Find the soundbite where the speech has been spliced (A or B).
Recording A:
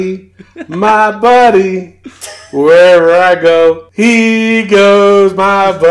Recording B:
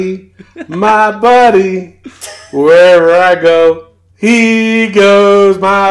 A